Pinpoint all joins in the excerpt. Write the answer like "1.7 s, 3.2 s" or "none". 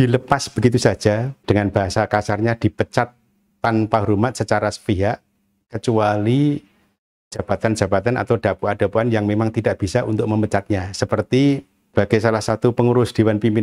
1.3 s, 11.8 s